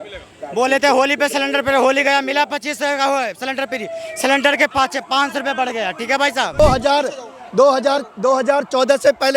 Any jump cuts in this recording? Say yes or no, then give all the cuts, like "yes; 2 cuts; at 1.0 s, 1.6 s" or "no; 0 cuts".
yes; 1 cut; at 6.6 s